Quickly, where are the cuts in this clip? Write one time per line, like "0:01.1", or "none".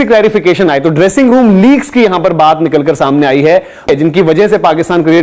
0:03.9